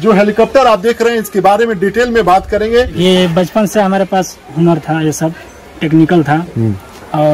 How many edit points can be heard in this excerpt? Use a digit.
1